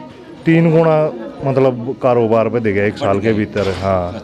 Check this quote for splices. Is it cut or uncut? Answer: uncut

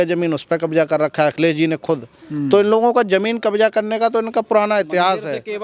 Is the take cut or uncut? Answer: uncut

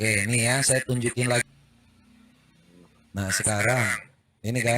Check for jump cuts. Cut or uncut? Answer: cut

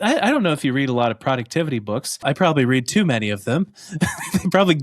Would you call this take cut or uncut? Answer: cut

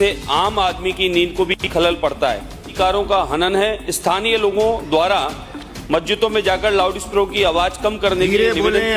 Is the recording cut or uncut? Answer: cut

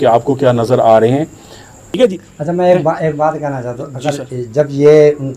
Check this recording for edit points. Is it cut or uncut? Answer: cut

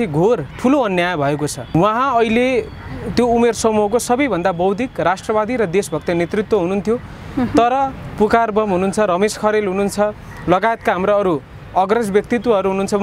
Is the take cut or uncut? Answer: uncut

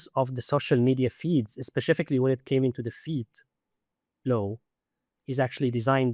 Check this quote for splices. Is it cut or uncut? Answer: uncut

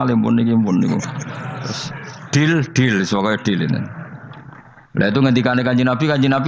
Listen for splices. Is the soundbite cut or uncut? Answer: uncut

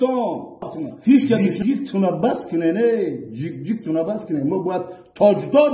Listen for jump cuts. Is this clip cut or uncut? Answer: cut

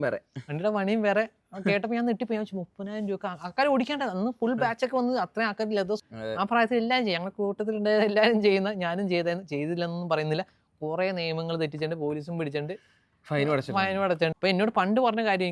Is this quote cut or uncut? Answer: cut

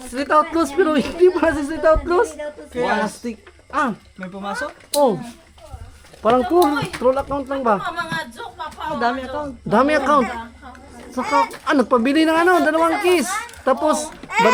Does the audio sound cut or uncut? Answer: uncut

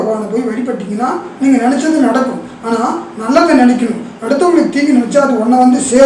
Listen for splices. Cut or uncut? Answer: uncut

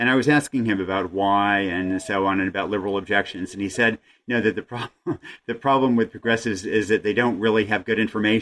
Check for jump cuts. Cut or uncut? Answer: uncut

